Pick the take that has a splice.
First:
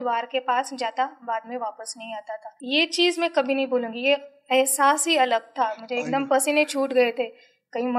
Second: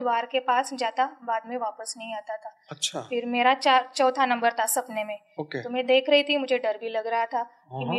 first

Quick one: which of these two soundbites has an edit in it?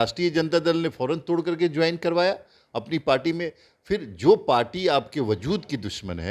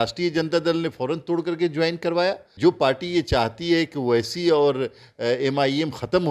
second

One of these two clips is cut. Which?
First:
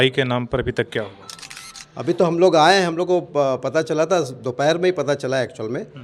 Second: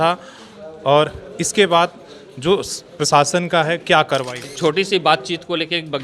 second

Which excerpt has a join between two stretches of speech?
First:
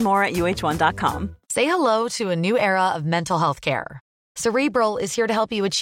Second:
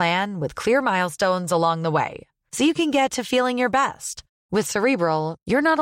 first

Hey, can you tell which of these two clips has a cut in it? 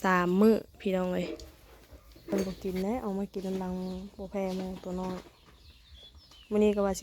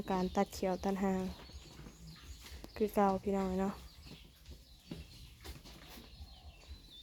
first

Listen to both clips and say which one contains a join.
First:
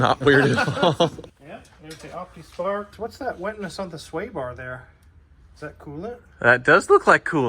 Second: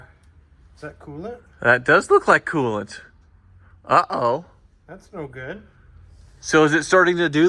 first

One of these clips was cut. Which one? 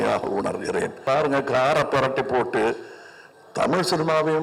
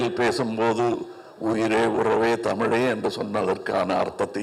first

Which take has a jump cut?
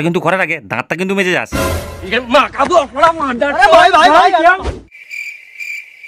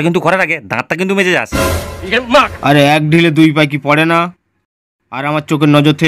second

